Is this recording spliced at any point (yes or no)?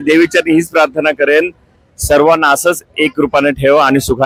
no